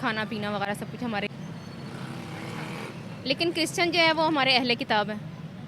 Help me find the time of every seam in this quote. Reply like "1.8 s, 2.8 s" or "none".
1.3 s